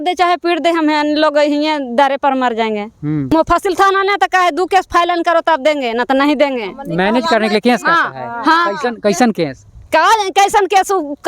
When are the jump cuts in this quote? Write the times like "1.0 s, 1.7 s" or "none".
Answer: 3.3 s